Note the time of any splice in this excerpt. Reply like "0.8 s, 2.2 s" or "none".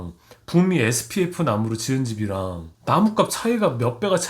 2.7 s